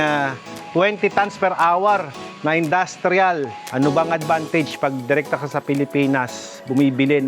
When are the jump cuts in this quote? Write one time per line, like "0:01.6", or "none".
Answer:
0:03.6